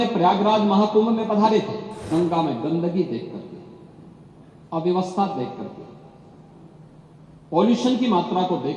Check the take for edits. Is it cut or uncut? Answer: cut